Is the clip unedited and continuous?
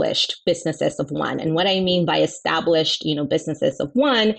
yes; 0 cuts

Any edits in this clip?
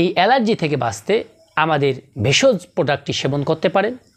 yes; 2 cuts; at 1.4 s, 2.1 s

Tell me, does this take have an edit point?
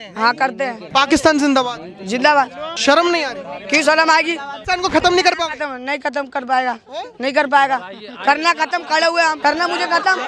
yes; 4 cuts; at 0.8 s, 2.6 s, 4.5 s, 9.4 s

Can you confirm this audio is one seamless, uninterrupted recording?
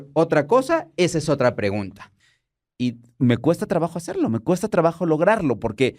no; 1 cut; at 2.1 s

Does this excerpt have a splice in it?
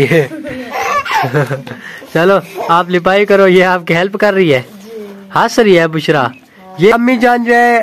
yes; 1 cut; at 6.9 s

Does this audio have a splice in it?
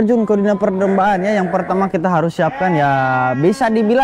no; 0 cuts

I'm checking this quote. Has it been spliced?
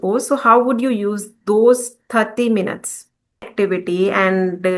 yes; 1 cut; at 3.5 s

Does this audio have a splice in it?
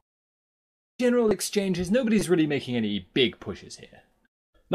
yes; 1 cut; at 1.4 s

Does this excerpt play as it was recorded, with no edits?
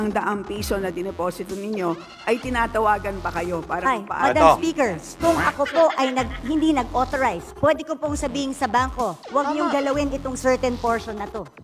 yes; 0 cuts

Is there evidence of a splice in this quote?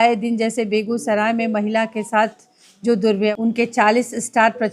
yes; 1 cut; at 3.3 s

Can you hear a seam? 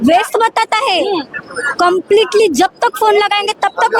no; 0 cuts

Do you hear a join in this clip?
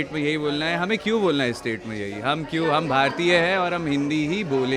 no; 0 cuts

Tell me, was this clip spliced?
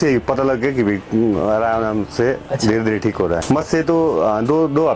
no; 0 cuts

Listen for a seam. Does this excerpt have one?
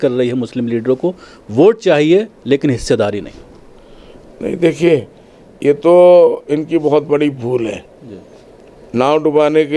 no; 0 cuts

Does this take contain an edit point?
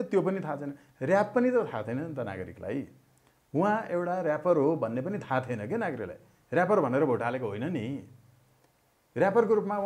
no; 0 cuts

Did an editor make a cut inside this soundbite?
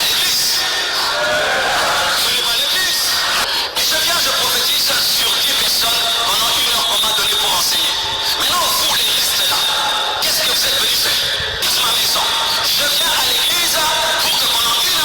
yes; 2 cuts; at 3.4 s, 11.6 s

